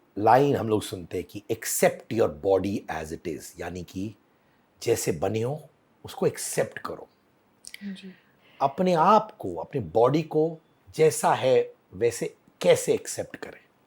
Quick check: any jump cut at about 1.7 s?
no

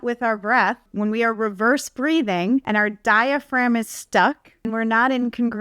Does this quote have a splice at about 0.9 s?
yes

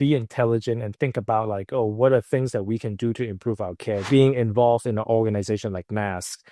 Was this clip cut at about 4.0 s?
yes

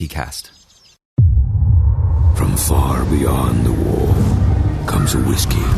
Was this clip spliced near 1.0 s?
yes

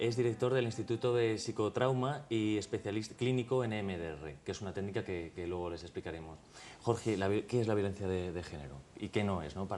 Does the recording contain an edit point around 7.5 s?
no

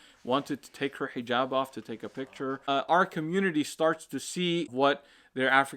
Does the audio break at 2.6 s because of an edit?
yes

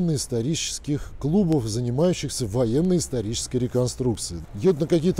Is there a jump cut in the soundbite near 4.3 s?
yes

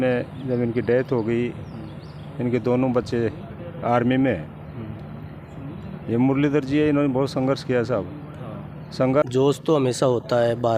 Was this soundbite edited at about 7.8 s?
no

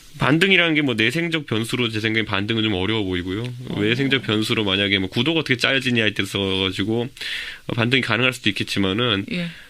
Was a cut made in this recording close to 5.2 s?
yes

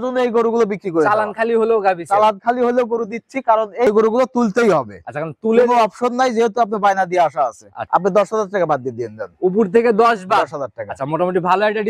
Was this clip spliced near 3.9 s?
yes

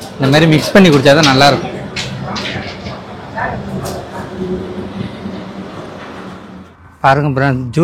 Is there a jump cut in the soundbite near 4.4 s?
no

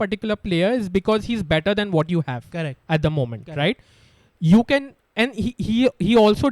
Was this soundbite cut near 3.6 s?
no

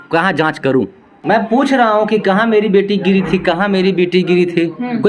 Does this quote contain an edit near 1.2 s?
yes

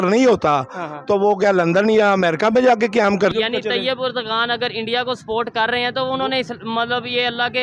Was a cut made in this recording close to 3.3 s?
yes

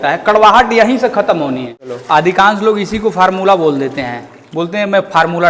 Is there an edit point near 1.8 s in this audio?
yes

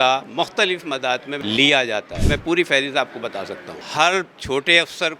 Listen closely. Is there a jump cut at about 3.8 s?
yes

